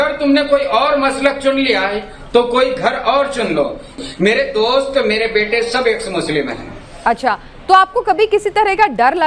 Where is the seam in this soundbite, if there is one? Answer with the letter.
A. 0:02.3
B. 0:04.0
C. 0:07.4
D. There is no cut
B